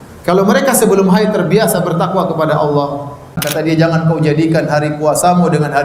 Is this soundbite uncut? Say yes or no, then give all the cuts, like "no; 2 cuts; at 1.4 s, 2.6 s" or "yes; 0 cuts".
no; 1 cut; at 3.4 s